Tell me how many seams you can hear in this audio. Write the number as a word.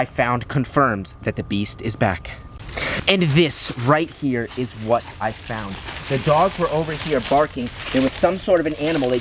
zero